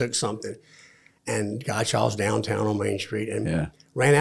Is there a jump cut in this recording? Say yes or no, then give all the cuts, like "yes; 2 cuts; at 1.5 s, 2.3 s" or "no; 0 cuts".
no; 0 cuts